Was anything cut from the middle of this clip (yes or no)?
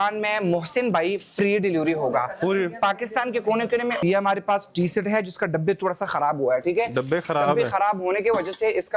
yes